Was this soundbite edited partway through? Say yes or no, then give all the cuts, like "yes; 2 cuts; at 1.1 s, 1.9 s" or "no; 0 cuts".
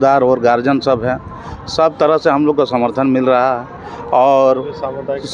no; 0 cuts